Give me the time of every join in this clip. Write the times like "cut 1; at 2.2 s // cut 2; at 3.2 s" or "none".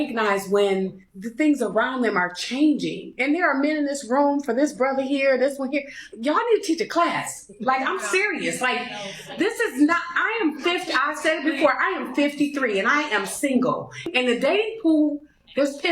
cut 1; at 5.1 s